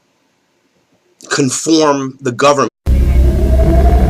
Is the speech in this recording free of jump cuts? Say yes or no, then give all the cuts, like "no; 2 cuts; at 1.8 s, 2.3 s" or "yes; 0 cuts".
yes; 0 cuts